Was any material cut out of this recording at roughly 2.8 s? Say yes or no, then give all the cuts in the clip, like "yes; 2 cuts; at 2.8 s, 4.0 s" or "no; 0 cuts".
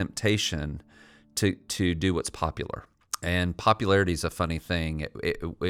yes; 1 cut; at 2.8 s